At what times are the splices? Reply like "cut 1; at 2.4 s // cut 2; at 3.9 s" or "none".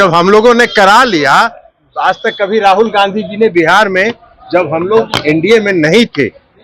none